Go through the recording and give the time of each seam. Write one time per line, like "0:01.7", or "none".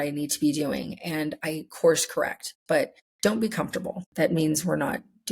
0:03.0
0:04.0